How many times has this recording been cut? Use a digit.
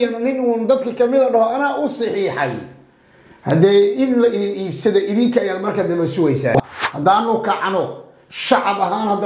1